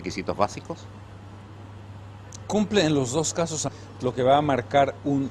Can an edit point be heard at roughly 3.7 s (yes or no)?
no